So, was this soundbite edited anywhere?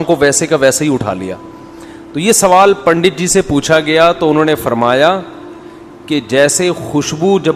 no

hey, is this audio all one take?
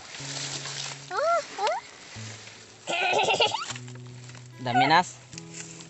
yes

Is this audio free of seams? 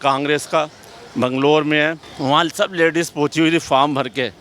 no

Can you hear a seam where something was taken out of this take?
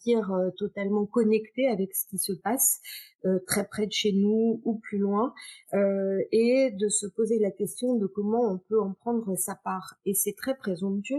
no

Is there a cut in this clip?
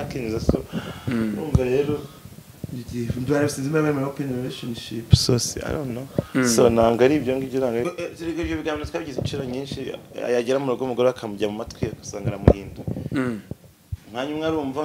yes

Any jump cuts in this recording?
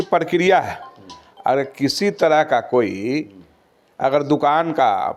no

